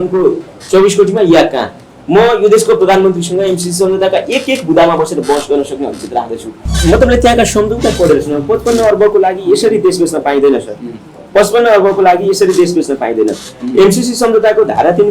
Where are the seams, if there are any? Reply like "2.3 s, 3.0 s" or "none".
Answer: 6.6 s